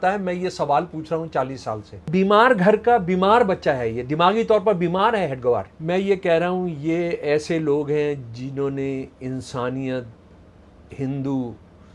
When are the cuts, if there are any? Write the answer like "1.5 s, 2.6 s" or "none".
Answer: 2.1 s, 5.7 s

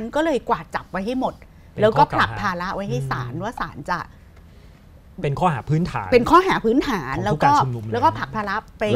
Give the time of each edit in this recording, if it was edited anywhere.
none

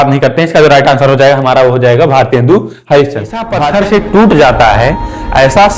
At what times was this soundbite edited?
3.6 s

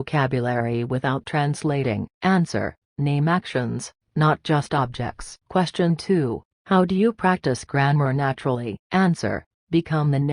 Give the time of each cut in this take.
5.4 s

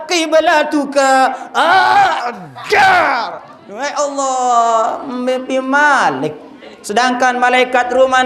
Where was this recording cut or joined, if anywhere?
none

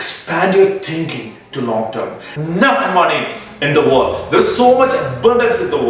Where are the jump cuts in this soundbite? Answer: 2.4 s

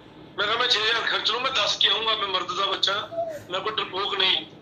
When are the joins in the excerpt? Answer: none

